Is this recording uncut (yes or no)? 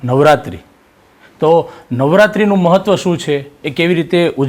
yes